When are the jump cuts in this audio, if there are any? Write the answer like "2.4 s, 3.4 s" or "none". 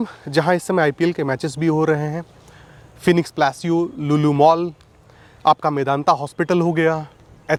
none